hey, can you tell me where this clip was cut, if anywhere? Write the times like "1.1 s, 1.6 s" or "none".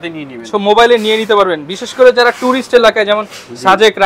none